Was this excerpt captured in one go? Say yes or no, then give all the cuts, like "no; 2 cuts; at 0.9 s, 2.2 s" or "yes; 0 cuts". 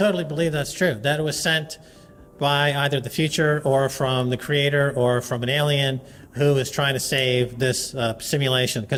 yes; 0 cuts